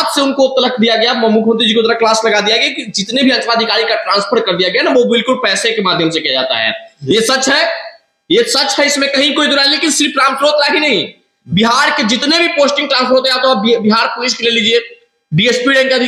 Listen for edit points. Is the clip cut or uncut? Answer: uncut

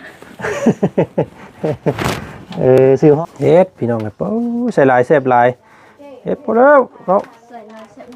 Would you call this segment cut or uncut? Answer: cut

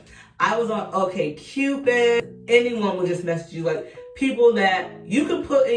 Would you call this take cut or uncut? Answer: cut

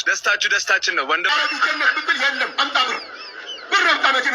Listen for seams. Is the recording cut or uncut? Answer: cut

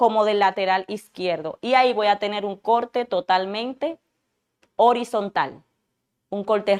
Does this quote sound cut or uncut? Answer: uncut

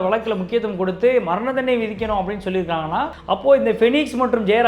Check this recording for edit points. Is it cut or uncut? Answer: cut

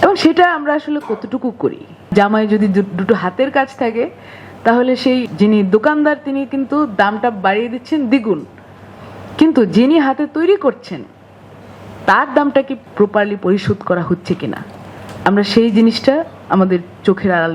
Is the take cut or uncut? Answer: cut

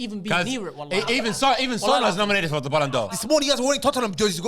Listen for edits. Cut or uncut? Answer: cut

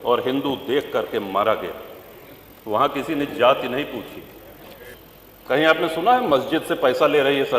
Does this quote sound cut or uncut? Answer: cut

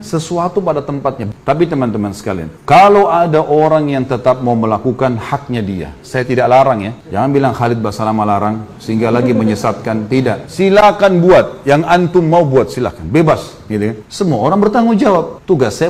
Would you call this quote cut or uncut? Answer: cut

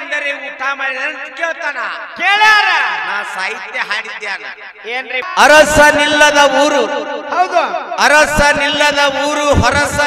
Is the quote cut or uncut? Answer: cut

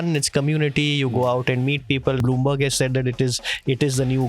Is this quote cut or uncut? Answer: cut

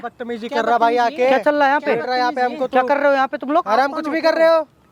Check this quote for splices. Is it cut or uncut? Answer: uncut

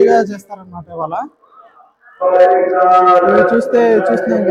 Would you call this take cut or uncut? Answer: uncut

